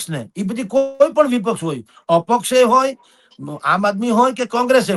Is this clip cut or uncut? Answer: uncut